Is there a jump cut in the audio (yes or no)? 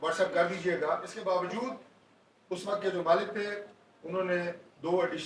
yes